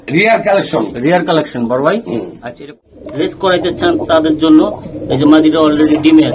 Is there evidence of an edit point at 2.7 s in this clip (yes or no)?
yes